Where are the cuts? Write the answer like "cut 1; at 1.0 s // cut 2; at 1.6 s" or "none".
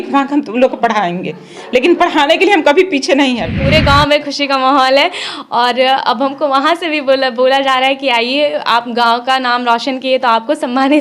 cut 1; at 3.5 s